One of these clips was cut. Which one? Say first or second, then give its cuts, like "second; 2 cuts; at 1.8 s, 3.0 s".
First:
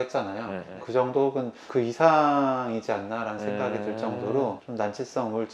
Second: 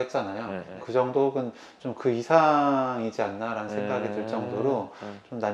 first; 2 cuts; at 1.6 s, 4.6 s